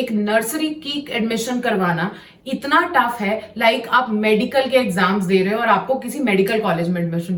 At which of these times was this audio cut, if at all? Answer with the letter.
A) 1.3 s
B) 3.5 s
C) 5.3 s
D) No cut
D